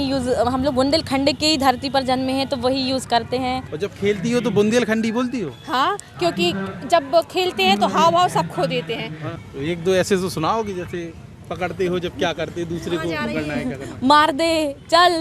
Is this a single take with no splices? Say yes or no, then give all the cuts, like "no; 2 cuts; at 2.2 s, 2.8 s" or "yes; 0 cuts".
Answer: no; 2 cuts; at 3.7 s, 9.4 s